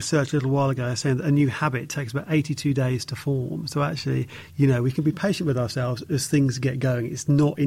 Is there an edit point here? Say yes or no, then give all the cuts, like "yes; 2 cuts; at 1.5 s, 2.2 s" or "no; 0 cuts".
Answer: no; 0 cuts